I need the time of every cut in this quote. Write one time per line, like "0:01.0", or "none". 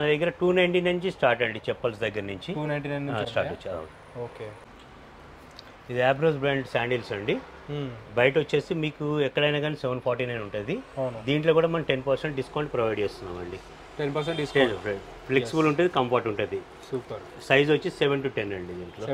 none

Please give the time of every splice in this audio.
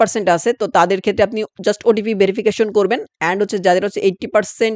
none

